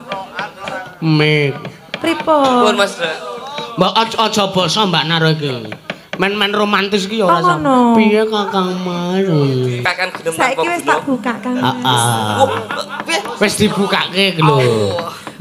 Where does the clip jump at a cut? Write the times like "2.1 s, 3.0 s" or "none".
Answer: 9.8 s